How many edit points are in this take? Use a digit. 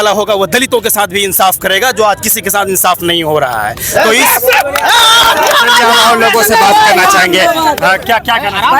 0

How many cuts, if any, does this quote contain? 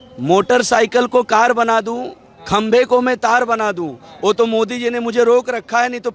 0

